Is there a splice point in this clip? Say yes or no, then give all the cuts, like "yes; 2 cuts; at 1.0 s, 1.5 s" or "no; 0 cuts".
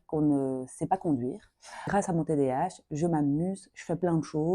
yes; 1 cut; at 1.9 s